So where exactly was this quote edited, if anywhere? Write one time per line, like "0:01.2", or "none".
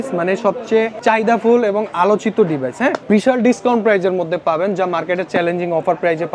0:00.9
0:03.0